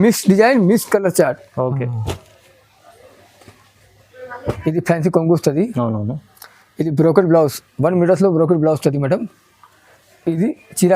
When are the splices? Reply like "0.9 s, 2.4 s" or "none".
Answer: 4.5 s